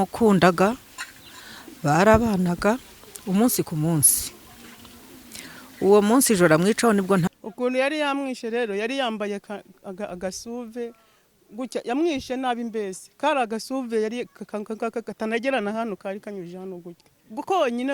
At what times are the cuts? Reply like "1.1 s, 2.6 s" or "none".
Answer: 7.3 s

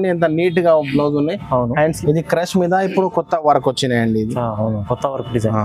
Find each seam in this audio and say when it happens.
2.0 s

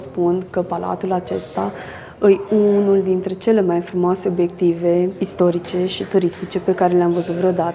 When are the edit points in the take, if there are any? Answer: none

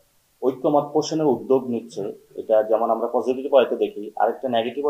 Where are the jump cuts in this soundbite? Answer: none

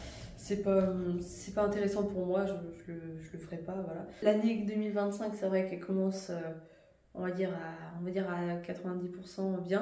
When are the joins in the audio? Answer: 4.2 s

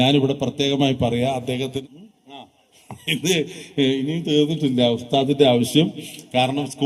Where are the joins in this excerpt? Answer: 1.8 s

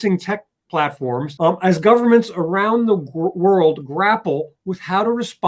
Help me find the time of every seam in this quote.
1.3 s

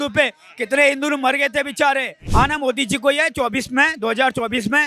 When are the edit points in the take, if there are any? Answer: 2.2 s

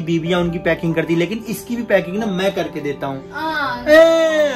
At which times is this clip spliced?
none

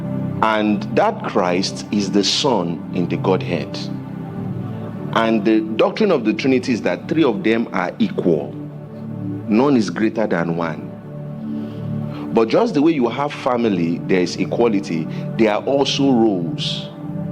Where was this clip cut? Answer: none

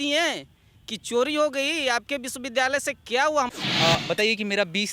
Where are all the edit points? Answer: 3.5 s

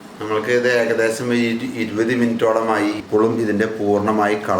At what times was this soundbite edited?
3.0 s

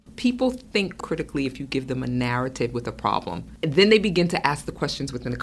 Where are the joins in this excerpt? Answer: 1.0 s, 3.4 s

